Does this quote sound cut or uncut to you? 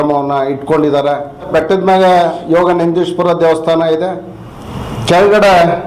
cut